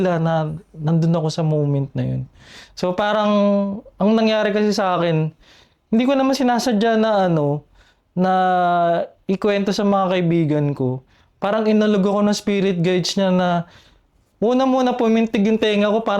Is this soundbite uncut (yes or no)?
yes